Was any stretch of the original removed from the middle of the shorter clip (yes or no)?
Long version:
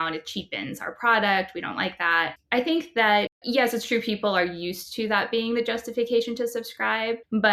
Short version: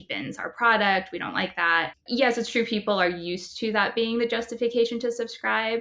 yes